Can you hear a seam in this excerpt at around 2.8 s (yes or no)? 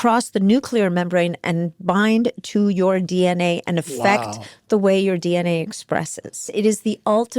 no